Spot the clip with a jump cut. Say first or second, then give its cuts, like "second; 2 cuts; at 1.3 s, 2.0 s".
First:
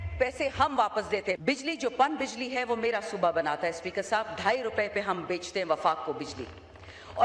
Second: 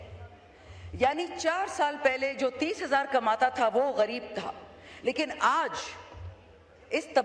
first; 1 cut; at 1.4 s